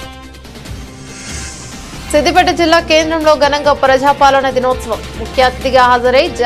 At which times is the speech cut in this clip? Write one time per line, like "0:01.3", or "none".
0:02.1